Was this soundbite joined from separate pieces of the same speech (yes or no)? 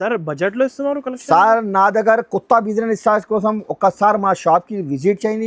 no